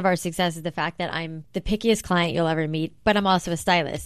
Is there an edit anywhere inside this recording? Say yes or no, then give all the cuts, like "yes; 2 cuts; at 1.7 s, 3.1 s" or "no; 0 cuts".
yes; 1 cut; at 1.4 s